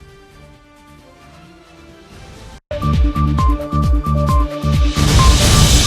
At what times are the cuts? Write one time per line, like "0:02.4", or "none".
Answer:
0:02.5